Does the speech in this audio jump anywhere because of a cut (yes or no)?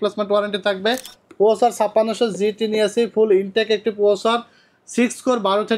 yes